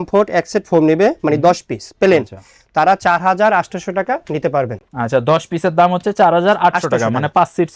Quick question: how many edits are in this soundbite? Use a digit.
0